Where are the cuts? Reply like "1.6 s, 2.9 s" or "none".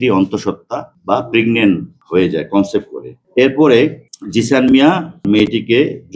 1.9 s, 5.2 s